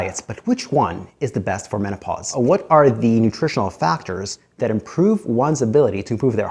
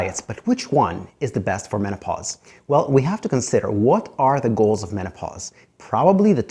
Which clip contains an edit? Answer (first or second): first